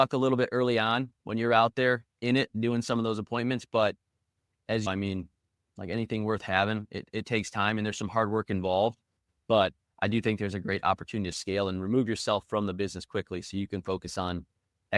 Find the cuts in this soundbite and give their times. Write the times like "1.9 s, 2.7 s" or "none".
none